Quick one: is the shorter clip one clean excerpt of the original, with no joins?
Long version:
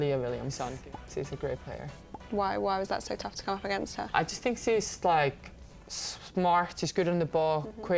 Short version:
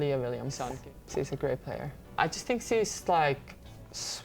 no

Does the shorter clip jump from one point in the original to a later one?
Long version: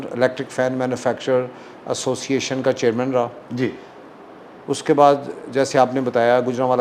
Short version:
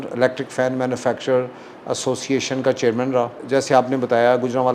yes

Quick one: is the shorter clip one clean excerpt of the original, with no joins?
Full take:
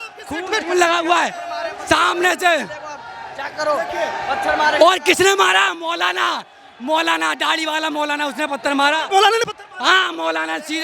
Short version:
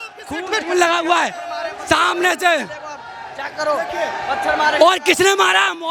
yes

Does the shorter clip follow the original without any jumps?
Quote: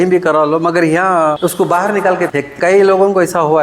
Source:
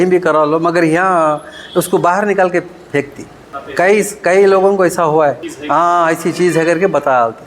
no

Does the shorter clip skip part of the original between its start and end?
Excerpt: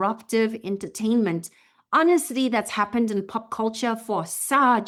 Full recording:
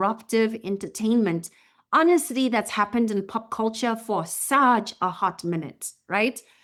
no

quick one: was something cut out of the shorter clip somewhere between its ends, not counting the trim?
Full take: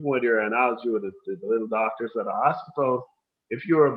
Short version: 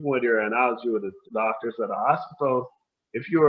yes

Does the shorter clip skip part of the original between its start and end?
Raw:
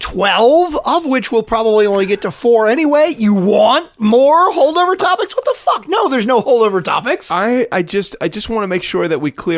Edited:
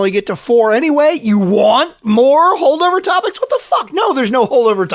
no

